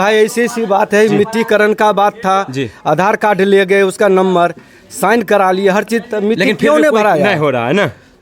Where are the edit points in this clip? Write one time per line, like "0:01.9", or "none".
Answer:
none

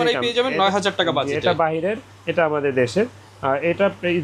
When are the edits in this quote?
none

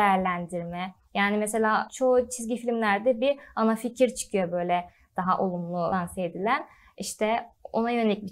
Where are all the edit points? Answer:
0:01.9
0:05.9

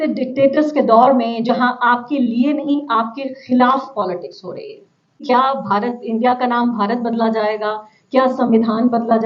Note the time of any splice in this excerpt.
0:05.2

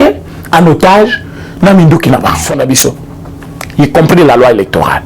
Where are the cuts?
0:02.4

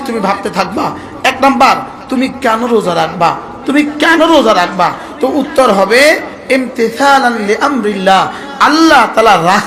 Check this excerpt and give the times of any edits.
none

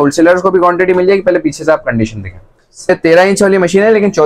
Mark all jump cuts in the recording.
0:02.9

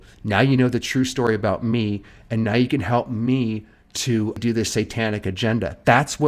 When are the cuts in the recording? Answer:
0:04.4

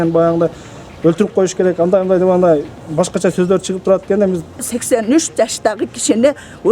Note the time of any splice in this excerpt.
0:04.6

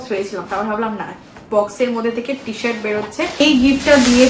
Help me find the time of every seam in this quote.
0:03.4

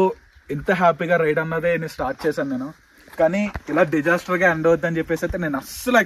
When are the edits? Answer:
none

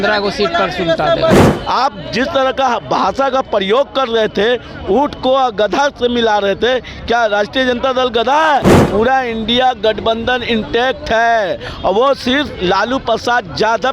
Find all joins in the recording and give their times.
0:01.3
0:08.8

